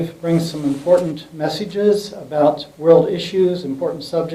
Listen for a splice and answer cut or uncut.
uncut